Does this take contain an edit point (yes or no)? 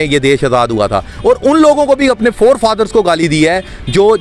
no